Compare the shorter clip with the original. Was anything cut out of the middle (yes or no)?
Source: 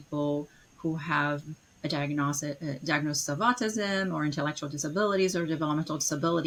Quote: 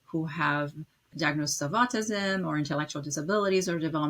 yes